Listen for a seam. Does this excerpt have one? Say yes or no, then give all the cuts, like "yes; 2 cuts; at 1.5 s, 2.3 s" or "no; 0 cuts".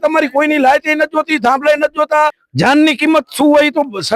yes; 1 cut; at 2.4 s